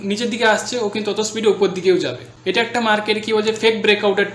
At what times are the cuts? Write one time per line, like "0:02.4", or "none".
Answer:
0:02.2